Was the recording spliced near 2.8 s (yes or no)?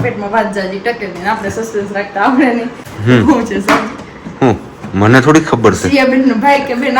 yes